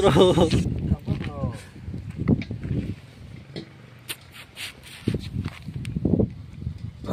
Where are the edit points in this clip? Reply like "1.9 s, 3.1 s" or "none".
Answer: none